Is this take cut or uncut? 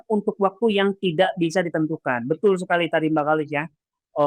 uncut